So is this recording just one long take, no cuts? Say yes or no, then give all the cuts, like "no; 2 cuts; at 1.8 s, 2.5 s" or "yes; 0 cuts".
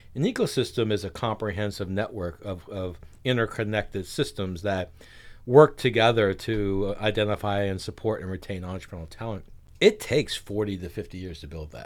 no; 1 cut; at 9.6 s